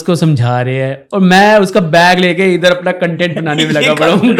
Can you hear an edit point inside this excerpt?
no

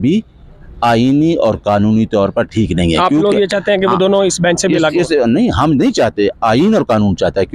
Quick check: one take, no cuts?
yes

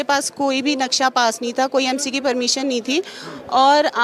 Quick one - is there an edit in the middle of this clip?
no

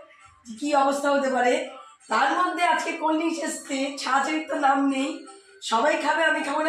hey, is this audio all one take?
yes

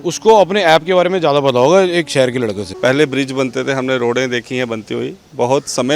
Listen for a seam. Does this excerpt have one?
yes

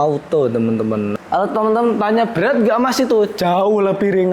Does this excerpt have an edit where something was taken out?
yes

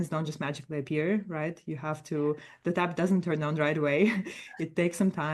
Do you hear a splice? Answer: no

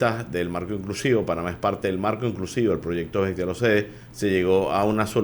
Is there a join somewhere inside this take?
yes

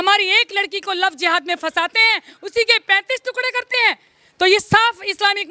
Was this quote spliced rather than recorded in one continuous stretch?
no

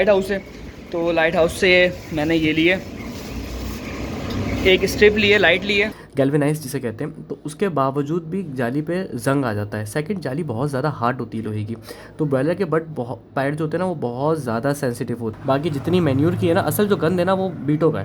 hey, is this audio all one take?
no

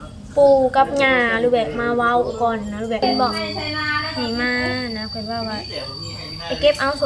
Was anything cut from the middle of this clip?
yes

